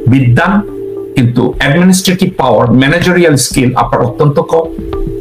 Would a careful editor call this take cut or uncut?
uncut